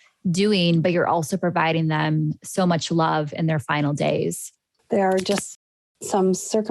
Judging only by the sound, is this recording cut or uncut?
cut